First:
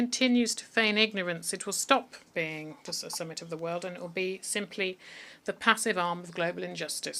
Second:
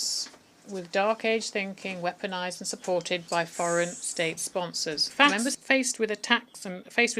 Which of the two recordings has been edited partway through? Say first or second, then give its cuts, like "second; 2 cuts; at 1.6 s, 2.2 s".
second; 1 cut; at 5.1 s